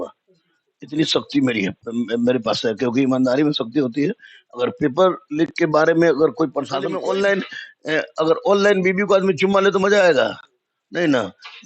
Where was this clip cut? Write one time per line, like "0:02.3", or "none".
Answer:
0:06.9